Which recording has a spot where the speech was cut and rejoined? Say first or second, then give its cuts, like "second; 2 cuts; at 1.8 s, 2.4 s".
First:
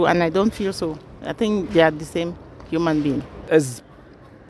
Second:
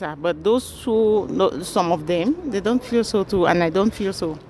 first; 1 cut; at 3.5 s